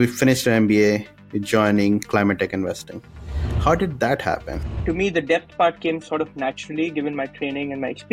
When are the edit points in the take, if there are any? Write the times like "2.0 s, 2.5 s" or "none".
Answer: 4.8 s